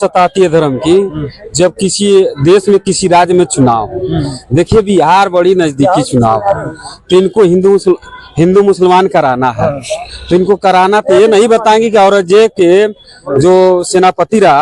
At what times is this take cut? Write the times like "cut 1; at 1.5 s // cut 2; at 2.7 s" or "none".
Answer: none